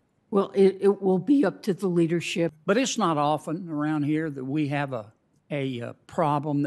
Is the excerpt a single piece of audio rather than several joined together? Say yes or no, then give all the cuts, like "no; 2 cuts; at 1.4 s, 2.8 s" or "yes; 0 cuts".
no; 1 cut; at 2.6 s